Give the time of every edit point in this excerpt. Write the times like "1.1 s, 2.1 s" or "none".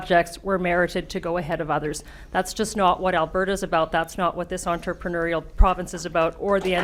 none